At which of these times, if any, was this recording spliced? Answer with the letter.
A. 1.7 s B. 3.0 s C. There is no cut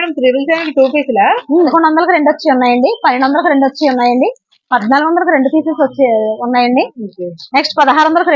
A